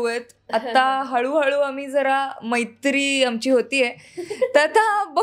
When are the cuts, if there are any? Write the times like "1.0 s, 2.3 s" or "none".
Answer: none